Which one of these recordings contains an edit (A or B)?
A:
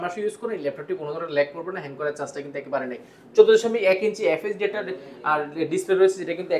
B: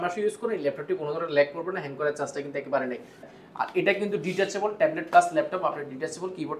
B